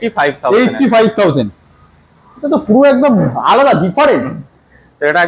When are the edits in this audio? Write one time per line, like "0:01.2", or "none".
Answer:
none